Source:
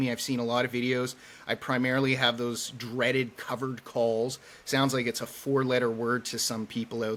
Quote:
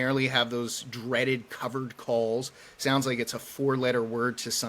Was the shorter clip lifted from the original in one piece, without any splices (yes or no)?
yes